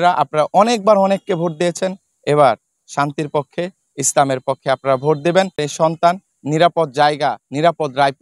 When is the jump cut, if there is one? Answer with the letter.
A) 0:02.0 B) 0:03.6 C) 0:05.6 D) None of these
C